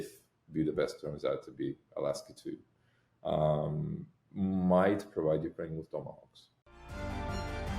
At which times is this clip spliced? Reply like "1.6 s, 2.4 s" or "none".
6.5 s